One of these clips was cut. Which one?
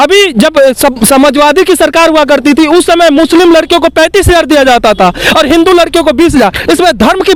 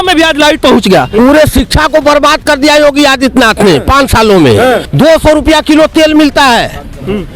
second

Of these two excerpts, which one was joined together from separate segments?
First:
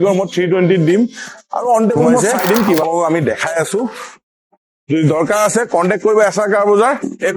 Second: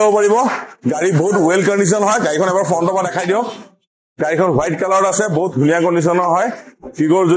first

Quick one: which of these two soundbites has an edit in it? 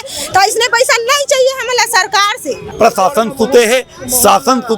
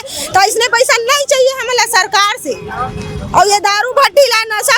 first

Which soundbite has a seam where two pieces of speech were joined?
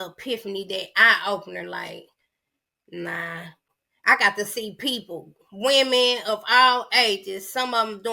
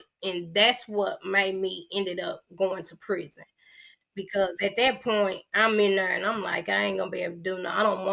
first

